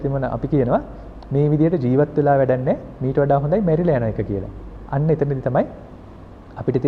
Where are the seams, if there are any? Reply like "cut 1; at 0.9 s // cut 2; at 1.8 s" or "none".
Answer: none